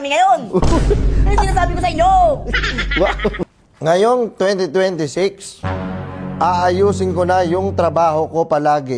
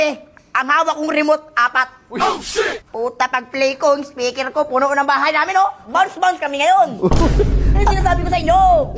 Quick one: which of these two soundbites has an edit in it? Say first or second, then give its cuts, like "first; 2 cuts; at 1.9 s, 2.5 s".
first; 1 cut; at 3.6 s